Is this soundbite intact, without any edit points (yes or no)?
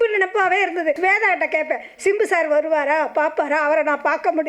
no